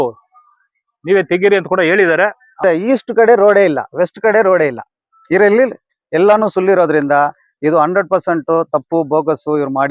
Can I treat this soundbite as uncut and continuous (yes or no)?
no